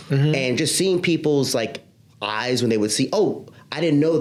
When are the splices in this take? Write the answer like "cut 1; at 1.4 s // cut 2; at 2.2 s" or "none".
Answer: none